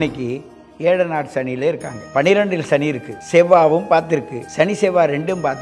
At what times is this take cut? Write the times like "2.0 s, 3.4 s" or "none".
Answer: 1.9 s, 3.1 s, 4.4 s

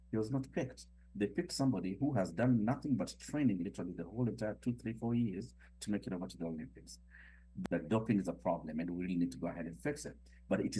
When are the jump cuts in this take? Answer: 7.5 s

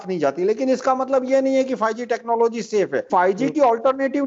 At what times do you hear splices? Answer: 3.1 s

